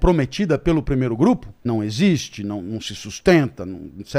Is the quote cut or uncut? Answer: cut